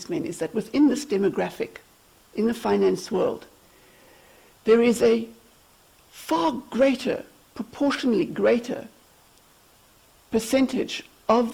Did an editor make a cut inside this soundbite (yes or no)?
no